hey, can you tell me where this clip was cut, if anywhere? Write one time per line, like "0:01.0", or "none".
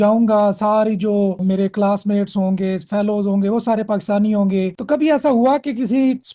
0:01.4
0:04.7